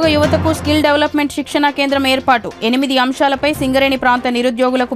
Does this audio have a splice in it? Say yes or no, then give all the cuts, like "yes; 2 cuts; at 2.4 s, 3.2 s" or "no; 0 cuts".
no; 0 cuts